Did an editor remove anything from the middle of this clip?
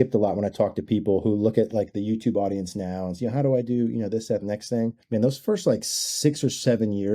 yes; 1 cut; at 5.0 s

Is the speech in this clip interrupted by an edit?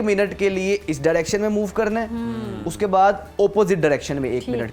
no; 0 cuts

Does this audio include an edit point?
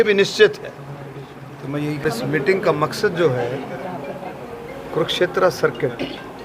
yes; 1 cut; at 2.0 s

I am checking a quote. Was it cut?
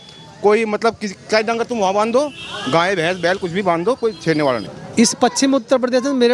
yes; 1 cut; at 4.8 s

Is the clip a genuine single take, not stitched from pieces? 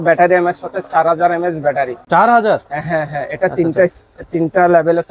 yes; 0 cuts

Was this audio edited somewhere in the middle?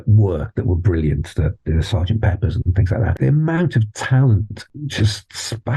yes; 2 cuts; at 3.1 s, 4.6 s

